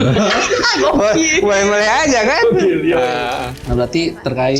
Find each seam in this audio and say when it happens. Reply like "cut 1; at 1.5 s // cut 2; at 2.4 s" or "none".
cut 1; at 3.5 s